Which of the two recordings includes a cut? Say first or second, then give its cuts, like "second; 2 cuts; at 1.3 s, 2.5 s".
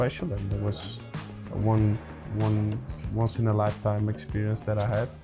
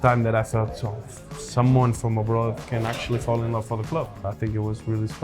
second; 1 cut; at 4.2 s